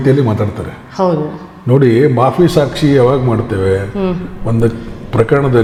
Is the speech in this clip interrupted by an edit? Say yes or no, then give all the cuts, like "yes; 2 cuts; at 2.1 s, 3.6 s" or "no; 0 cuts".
no; 0 cuts